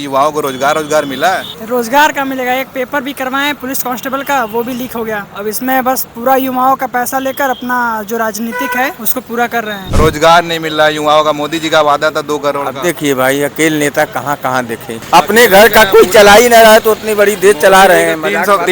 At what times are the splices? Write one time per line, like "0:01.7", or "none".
0:01.5
0:03.6
0:05.3
0:09.0
0:09.8
0:14.9